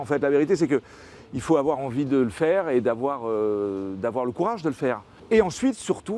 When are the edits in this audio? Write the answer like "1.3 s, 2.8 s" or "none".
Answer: 5.1 s